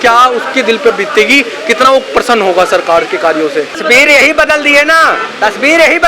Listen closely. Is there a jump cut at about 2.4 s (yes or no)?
no